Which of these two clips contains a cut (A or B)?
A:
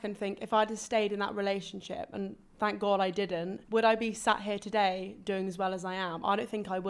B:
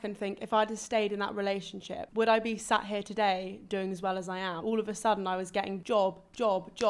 B